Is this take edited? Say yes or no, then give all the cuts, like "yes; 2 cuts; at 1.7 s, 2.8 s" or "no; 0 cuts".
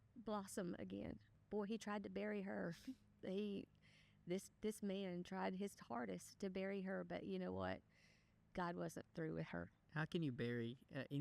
yes; 2 cuts; at 1.4 s, 9.8 s